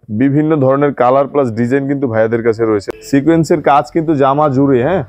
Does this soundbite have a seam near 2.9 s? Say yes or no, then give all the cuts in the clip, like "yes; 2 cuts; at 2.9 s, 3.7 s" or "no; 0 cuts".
yes; 1 cut; at 2.9 s